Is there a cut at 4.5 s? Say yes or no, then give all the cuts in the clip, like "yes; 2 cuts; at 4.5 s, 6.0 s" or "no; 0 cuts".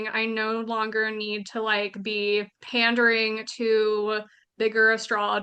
no; 1 cut; at 2.6 s